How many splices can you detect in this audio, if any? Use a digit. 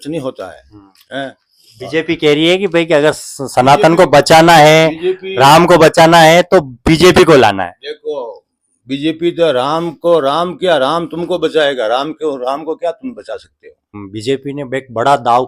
1